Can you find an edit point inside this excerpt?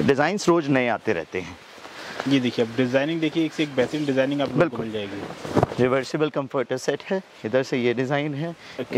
no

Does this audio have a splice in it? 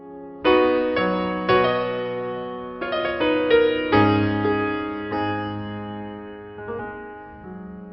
no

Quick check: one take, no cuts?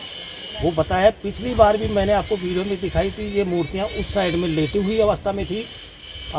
yes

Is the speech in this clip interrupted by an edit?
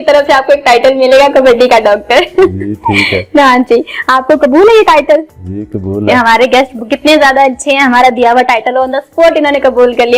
no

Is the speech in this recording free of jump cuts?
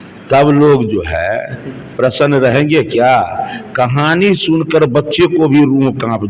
yes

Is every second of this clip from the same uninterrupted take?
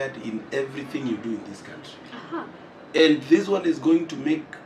yes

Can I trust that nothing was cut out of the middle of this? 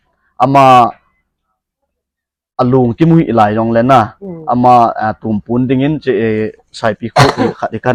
yes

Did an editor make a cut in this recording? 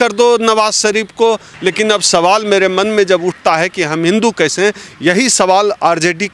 yes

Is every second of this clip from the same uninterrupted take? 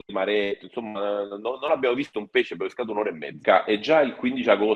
no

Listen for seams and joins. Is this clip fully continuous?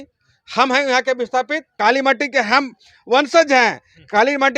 no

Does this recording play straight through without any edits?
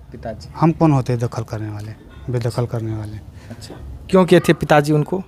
yes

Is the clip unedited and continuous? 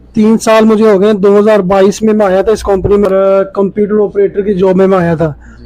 no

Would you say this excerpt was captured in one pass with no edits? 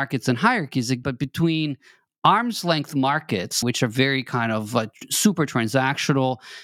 no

